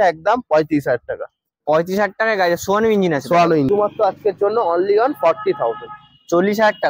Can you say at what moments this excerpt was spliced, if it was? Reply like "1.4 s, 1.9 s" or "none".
3.7 s